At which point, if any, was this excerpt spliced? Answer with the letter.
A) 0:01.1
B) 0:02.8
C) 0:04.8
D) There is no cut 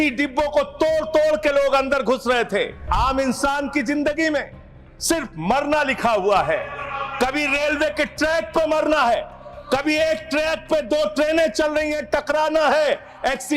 B